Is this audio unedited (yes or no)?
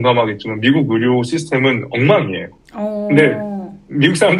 yes